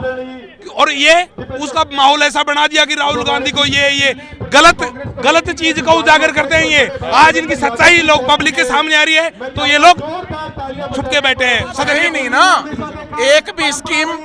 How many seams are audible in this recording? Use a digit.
1